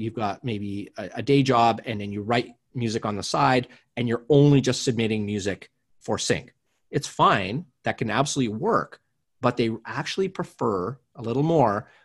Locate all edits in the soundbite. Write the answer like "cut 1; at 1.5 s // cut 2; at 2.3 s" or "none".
none

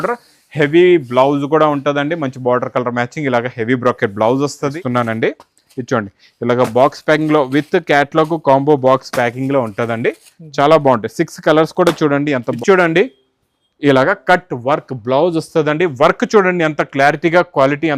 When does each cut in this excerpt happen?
cut 1; at 4.8 s // cut 2; at 12.5 s

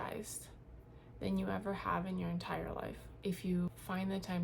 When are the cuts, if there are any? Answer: cut 1; at 3.1 s // cut 2; at 3.7 s

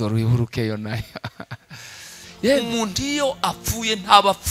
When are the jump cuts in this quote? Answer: cut 1; at 2.6 s

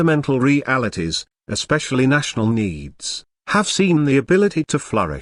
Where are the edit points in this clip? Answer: none

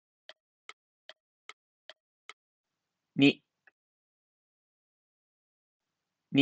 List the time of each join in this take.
cut 1; at 2.5 s

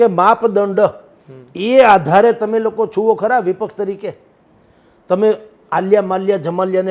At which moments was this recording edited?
none

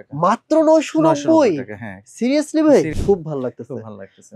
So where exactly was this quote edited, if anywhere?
cut 1; at 2.9 s

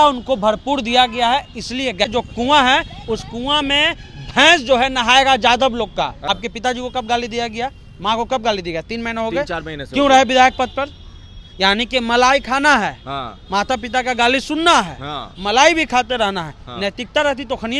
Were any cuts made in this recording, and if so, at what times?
cut 1; at 2.1 s // cut 2; at 6.2 s

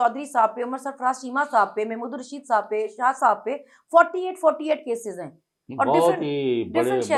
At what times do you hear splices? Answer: none

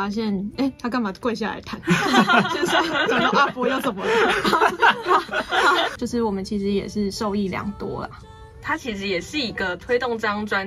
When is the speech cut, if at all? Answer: cut 1; at 5.9 s

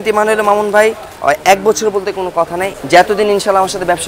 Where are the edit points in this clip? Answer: cut 1; at 2.6 s

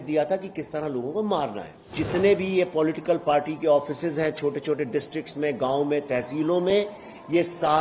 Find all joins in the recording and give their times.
cut 1; at 1.9 s

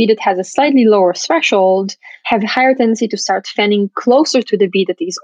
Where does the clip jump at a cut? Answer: none

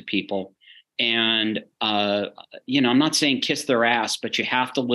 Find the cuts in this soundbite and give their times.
none

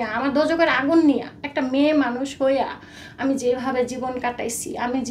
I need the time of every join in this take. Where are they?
none

